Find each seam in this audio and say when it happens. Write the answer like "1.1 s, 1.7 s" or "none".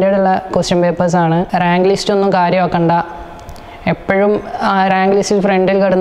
1.5 s

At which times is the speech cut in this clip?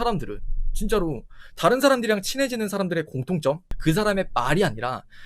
3.7 s

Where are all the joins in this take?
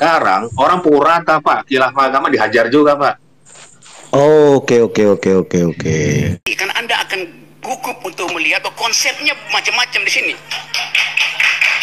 6.4 s

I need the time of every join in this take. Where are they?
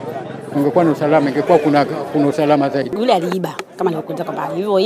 2.9 s

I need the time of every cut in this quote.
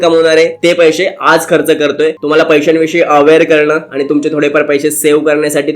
2.2 s

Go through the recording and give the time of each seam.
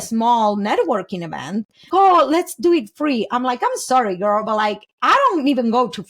1.9 s

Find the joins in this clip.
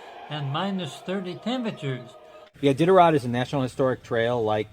2.4 s

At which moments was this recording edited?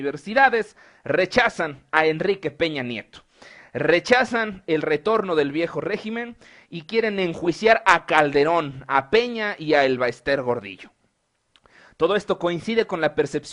none

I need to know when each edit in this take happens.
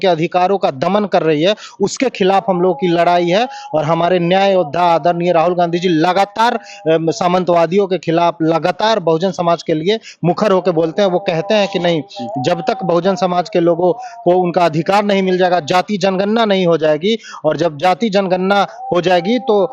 none

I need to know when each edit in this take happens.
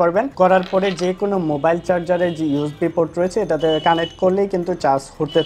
none

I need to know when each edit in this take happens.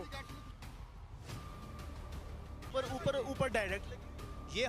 2.6 s

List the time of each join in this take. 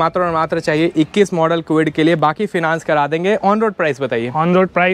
none

